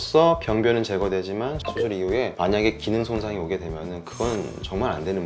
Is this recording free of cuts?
yes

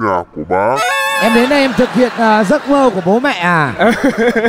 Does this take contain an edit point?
no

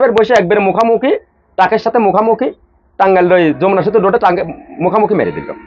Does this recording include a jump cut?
no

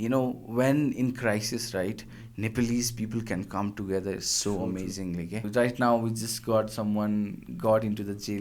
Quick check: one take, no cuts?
no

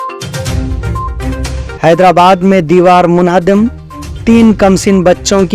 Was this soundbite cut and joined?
yes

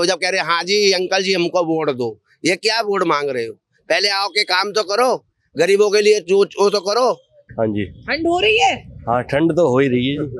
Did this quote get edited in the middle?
no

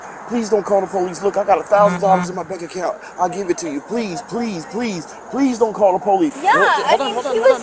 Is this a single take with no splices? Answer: no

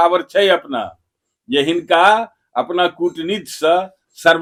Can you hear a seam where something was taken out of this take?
no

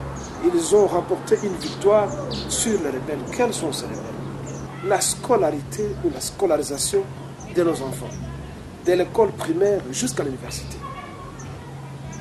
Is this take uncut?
no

